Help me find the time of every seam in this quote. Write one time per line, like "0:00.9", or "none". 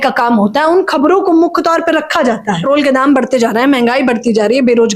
0:02.6